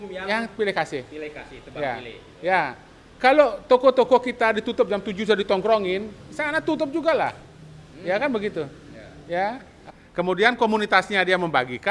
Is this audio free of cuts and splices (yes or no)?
no